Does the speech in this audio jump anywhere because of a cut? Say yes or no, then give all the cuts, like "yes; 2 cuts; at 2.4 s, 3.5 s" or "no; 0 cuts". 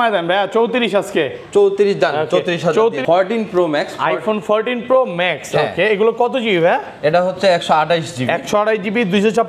yes; 1 cut; at 3.0 s